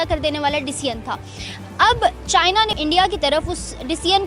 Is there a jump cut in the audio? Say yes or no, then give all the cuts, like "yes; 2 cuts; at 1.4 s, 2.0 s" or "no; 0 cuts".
yes; 1 cut; at 2.8 s